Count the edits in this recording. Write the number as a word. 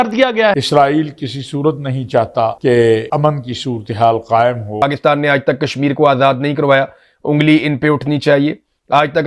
one